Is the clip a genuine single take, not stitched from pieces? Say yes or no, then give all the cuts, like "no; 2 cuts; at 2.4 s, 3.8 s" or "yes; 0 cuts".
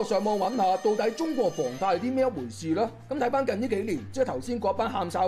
yes; 0 cuts